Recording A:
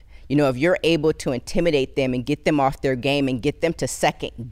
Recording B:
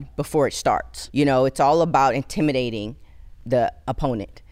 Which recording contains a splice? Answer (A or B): B